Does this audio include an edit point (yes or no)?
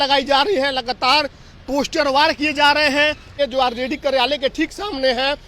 yes